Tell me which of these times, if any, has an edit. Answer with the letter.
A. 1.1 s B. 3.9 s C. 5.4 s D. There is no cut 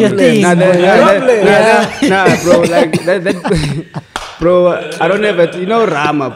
D